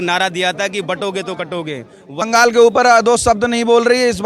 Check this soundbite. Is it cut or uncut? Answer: cut